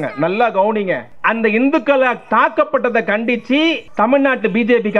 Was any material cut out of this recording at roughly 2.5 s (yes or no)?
no